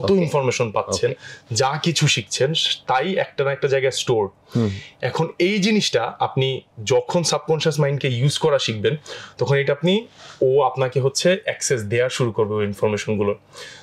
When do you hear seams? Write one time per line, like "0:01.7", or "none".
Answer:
none

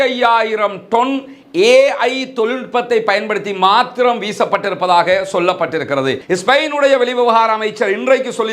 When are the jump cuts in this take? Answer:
0:06.2

